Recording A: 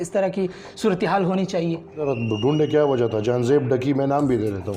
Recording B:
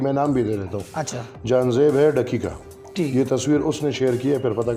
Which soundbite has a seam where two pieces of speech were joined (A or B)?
A